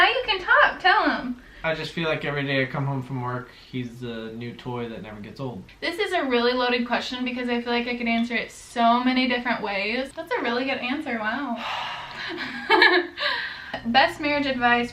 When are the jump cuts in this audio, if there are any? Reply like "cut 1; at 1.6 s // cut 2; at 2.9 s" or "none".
cut 1; at 1.5 s // cut 2; at 5.7 s // cut 3; at 10.2 s // cut 4; at 13.8 s